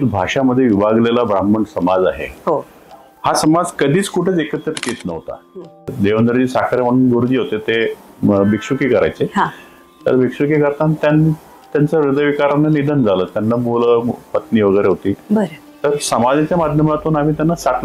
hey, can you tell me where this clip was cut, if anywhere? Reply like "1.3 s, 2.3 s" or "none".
5.9 s